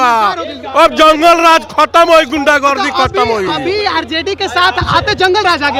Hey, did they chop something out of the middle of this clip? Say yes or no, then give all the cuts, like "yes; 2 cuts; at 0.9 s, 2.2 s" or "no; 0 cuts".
no; 0 cuts